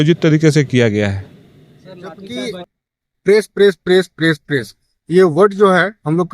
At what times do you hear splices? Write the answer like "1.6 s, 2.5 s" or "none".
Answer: 2.6 s